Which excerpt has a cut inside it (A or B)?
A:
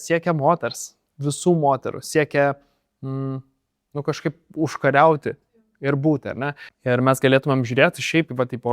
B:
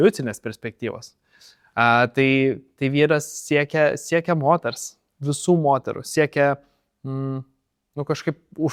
A